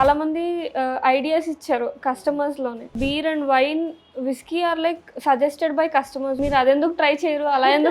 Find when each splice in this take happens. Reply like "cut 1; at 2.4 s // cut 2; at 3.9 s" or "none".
cut 1; at 3.0 s // cut 2; at 6.4 s